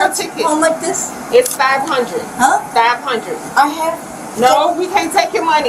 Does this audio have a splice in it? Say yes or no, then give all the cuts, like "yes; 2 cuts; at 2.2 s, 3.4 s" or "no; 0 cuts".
yes; 1 cut; at 4.2 s